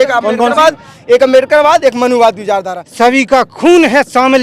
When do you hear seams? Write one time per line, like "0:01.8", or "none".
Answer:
0:02.8

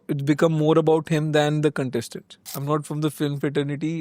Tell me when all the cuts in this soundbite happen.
0:02.4

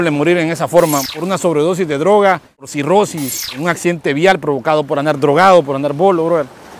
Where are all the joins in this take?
0:01.1
0:02.7
0:03.5

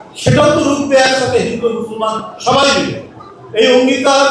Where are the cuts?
none

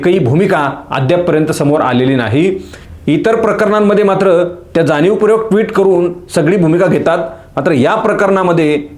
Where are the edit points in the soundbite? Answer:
none

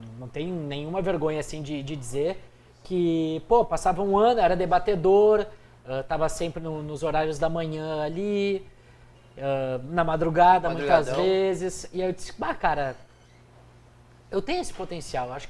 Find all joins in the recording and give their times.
none

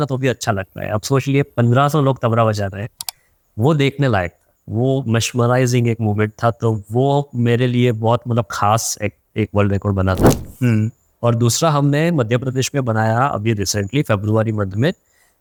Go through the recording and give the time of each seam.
none

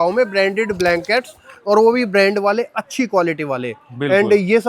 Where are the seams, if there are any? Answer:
none

